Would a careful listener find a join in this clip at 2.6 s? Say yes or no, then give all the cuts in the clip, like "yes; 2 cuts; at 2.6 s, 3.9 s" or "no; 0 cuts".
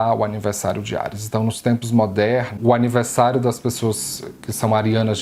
yes; 1 cut; at 2.6 s